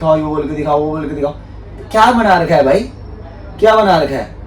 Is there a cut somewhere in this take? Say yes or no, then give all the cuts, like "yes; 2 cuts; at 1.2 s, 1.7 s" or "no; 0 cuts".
no; 0 cuts